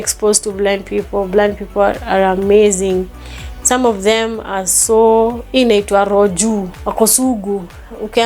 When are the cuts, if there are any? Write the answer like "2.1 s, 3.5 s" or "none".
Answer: 5.4 s, 6.8 s